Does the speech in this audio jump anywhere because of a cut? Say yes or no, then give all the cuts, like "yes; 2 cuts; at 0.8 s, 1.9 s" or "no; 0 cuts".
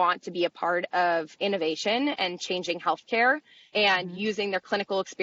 no; 0 cuts